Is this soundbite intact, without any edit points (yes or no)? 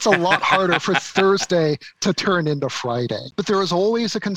no